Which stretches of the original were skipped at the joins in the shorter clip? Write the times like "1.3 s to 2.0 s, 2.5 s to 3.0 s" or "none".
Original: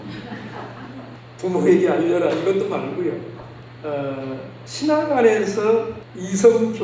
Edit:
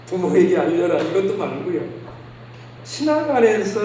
3.8 s to 4.3 s

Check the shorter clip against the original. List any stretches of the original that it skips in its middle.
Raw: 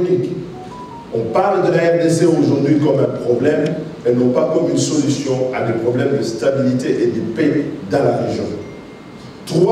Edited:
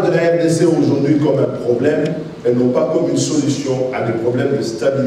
none

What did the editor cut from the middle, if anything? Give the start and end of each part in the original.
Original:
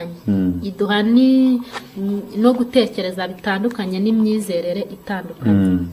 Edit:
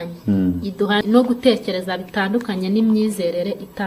1.0 s to 2.3 s

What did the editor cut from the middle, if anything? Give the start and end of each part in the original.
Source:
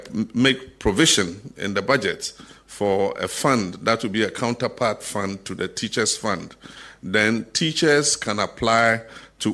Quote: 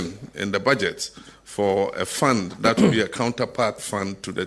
none

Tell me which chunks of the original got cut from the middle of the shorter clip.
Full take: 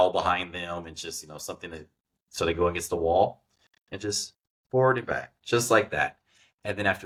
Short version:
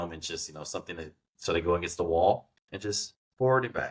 2.0 s to 2.2 s, 3.9 s to 4.3 s

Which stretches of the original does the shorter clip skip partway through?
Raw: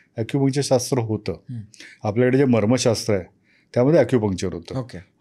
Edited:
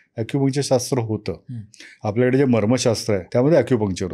3.2 s to 3.7 s

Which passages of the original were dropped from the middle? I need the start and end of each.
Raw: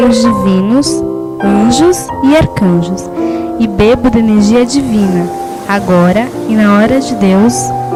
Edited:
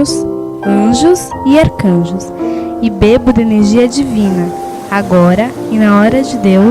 none

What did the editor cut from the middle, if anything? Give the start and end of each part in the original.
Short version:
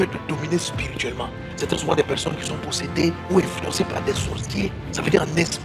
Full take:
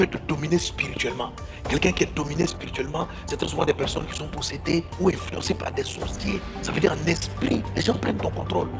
1.5 s to 3.2 s

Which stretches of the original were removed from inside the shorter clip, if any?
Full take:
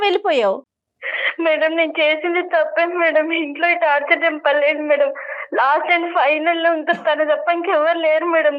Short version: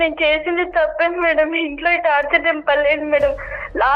none

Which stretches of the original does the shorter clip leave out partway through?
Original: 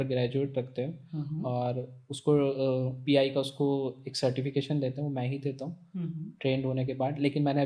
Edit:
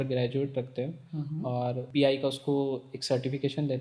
1.8 s to 3.0 s

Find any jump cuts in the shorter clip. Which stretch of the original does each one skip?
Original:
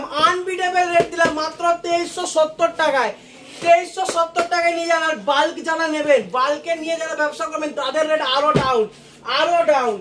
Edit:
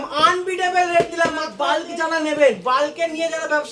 1.5 s to 5.2 s

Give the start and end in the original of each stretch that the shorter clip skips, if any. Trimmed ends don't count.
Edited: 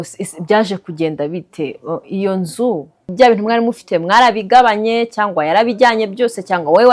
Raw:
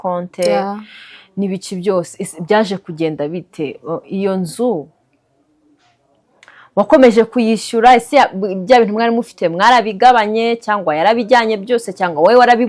5.1 s to 8.6 s

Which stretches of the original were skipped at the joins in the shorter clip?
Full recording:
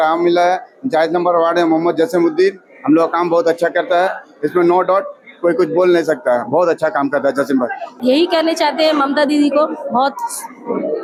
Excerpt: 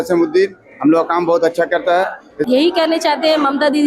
4.3 s to 7.9 s

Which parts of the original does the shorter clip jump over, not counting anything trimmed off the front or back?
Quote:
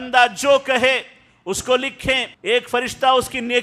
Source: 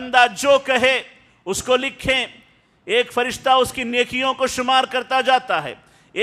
2.3 s to 2.7 s

